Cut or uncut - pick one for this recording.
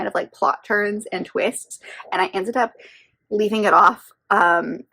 uncut